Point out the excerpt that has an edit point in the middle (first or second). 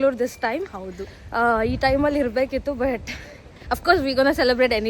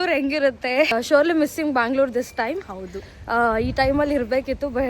second